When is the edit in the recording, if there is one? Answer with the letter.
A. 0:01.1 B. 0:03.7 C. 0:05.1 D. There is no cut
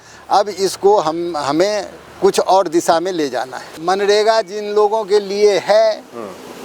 B